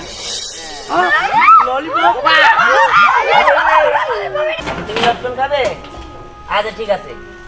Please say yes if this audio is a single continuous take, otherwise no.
no